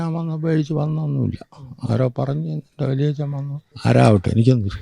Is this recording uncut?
no; 1 cut; at 3.6 s

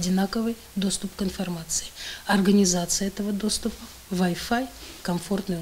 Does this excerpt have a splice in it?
no; 0 cuts

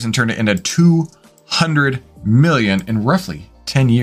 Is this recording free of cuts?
yes; 0 cuts

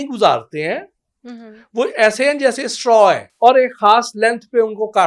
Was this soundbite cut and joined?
yes; 1 cut; at 3.3 s

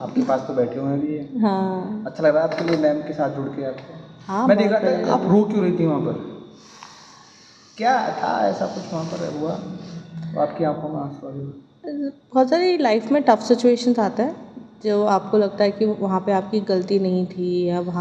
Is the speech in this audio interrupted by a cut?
no; 0 cuts

